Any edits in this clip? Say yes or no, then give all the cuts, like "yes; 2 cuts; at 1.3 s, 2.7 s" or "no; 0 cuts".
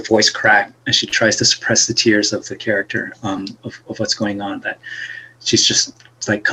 no; 0 cuts